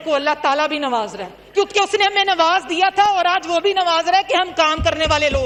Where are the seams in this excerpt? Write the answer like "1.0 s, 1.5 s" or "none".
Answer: none